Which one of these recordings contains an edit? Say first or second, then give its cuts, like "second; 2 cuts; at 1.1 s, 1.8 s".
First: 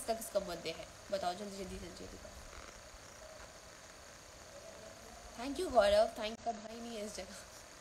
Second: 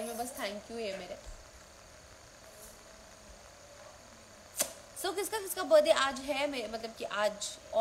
first; 1 cut; at 6.4 s